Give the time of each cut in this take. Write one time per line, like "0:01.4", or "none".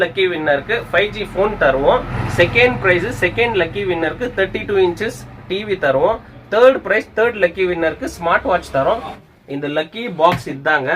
0:02.2
0:09.2